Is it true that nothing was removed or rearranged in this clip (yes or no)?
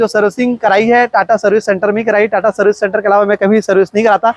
yes